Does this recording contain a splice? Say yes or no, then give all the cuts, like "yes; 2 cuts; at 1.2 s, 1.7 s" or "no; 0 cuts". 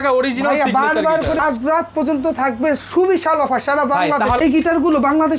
yes; 2 cuts; at 1.4 s, 4.4 s